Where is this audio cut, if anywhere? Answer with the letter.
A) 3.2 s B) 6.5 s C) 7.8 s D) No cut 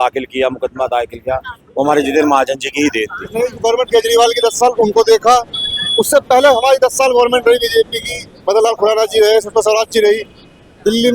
A